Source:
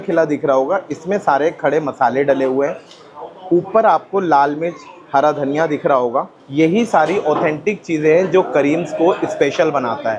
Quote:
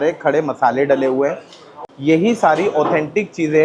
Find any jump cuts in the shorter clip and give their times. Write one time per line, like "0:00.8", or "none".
0:01.9